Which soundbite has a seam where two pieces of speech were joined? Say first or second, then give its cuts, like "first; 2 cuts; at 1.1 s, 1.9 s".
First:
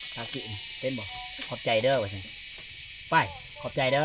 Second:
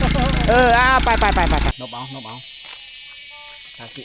second; 1 cut; at 1.8 s